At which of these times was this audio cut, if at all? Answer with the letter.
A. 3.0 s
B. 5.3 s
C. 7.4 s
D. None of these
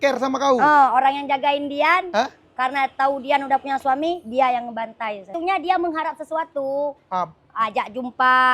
B